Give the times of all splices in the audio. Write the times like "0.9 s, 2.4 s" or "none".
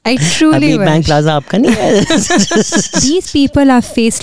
3.0 s

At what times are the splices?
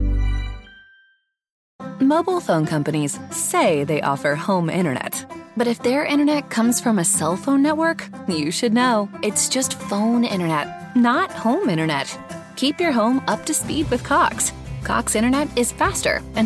1.6 s

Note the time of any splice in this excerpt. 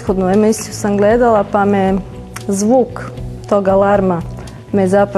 none

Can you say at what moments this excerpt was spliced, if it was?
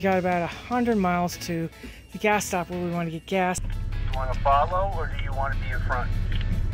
3.7 s

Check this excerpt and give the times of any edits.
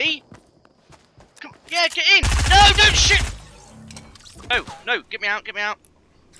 4.5 s

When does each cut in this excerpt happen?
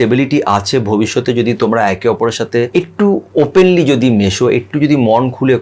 2.7 s

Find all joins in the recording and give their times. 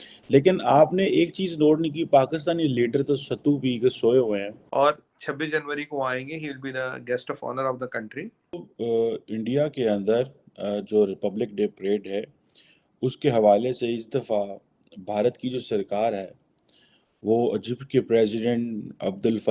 4.6 s, 8.7 s

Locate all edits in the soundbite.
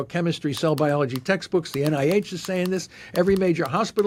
none

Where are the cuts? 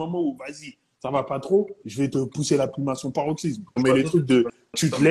1.8 s, 3.8 s

